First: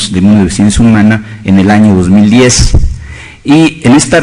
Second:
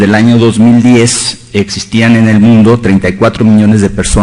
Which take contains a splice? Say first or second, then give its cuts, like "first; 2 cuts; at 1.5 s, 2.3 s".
first; 1 cut; at 2.0 s